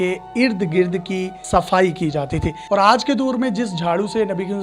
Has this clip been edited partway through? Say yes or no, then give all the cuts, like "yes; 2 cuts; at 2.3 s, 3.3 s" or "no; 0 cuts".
yes; 1 cut; at 2.6 s